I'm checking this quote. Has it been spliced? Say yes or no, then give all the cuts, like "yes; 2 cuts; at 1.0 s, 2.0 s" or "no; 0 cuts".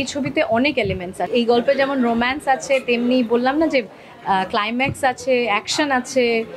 yes; 1 cut; at 1.3 s